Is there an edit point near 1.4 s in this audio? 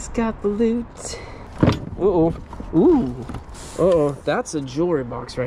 yes; 1 cut; at 1.4 s

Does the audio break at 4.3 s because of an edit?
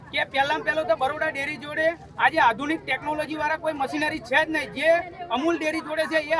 no; 0 cuts

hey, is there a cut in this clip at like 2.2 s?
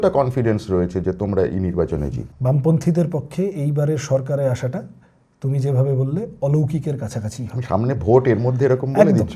yes; 1 cut; at 2.2 s

